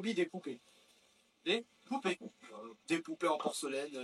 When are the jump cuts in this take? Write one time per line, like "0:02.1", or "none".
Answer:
none